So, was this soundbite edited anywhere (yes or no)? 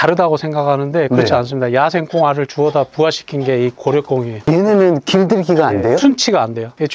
no